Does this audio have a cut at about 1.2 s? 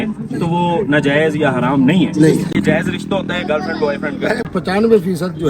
no; 2 cuts; at 2.5 s, 4.4 s

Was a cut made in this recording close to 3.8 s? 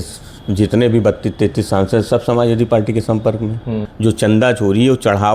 yes; 1 cut; at 3.8 s

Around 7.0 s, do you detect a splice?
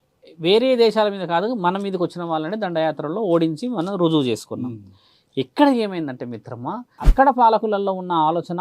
yes; 1 cut; at 7.0 s

